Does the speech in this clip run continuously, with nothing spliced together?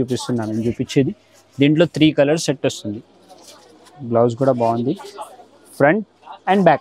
yes; 0 cuts

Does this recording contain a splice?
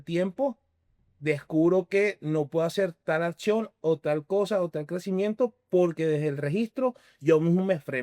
no; 0 cuts

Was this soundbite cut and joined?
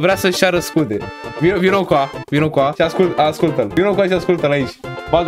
yes; 2 cuts; at 2.7 s, 3.7 s

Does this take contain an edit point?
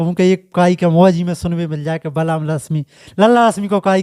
no; 0 cuts

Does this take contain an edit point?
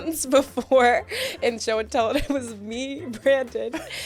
no; 0 cuts

